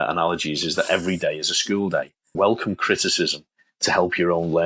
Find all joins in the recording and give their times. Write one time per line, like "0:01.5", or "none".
0:02.3